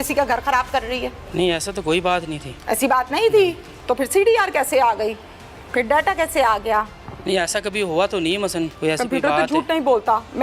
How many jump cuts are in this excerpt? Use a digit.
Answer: 3